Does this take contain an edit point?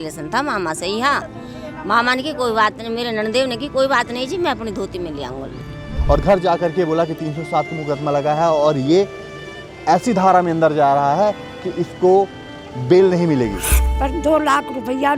yes; 2 cuts; at 5.9 s, 13.8 s

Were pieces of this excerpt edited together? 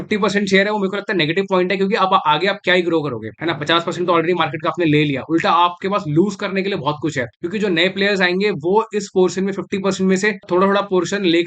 no; 0 cuts

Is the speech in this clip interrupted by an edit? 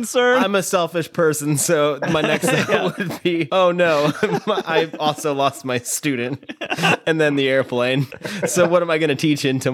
yes; 2 cuts; at 3.5 s, 8.1 s

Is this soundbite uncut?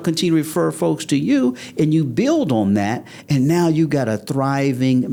yes; 0 cuts

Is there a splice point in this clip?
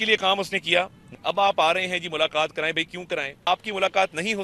yes; 2 cuts; at 1.1 s, 3.4 s

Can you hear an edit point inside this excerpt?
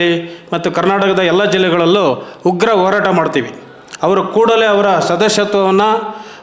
no; 0 cuts

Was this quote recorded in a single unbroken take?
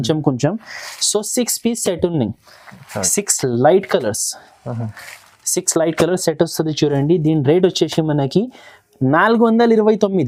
yes; 0 cuts

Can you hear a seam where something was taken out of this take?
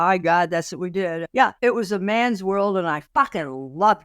yes; 2 cuts; at 1.4 s, 3.0 s

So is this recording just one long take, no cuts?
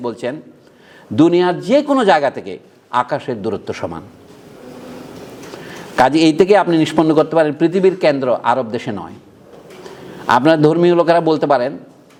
yes; 0 cuts

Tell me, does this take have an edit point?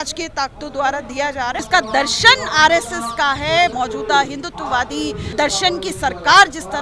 yes; 3 cuts; at 1.6 s, 3.7 s, 5.3 s

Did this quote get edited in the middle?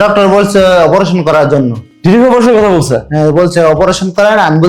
no; 0 cuts

